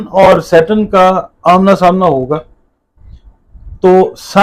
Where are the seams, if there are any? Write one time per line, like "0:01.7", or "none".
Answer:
none